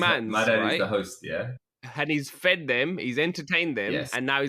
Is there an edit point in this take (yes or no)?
no